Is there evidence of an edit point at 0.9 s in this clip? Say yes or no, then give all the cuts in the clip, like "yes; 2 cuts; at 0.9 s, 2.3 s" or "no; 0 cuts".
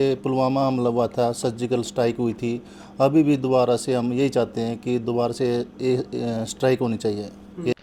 no; 0 cuts